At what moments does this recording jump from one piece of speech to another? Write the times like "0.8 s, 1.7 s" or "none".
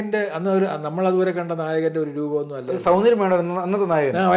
none